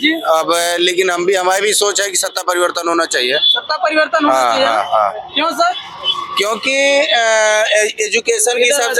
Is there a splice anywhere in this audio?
no; 0 cuts

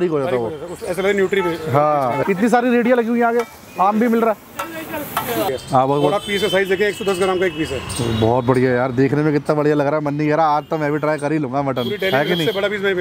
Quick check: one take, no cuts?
no; 2 cuts; at 2.2 s, 5.5 s

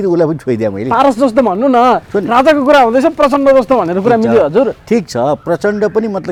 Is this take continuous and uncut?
yes; 0 cuts

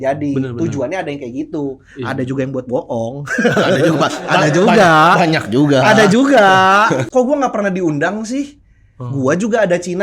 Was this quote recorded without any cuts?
no; 1 cut; at 7.1 s

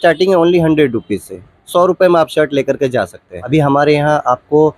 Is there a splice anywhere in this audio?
yes; 1 cut; at 3.4 s

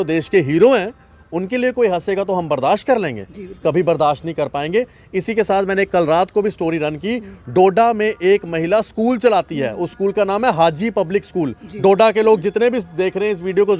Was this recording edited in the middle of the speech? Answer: no; 0 cuts

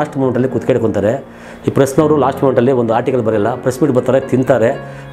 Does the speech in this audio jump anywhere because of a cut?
no; 0 cuts

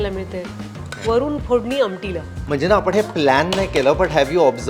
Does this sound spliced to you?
yes; 1 cut; at 2.3 s

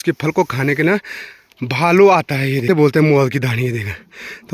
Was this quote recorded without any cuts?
no; 1 cut; at 2.7 s

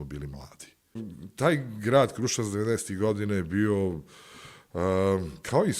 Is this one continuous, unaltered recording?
no; 1 cut; at 1.1 s

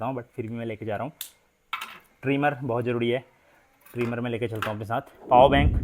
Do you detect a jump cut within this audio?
no; 0 cuts

